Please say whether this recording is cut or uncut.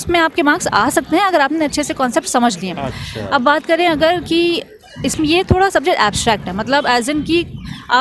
uncut